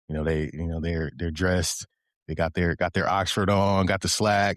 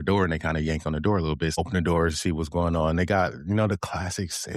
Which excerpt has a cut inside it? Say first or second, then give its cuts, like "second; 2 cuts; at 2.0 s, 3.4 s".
second; 1 cut; at 1.6 s